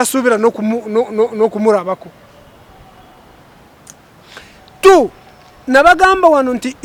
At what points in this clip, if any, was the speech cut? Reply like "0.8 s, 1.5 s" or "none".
none